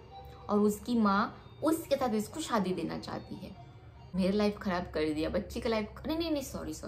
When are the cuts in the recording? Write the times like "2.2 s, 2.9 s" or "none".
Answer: 4.1 s